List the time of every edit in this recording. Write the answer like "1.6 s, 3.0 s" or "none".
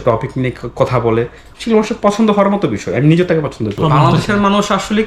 4.0 s